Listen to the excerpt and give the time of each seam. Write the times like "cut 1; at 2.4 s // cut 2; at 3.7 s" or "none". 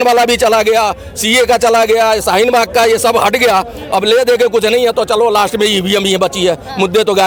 none